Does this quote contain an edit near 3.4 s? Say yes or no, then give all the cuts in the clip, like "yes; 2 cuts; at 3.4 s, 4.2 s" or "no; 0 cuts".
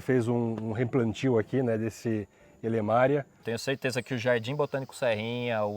yes; 1 cut; at 3.4 s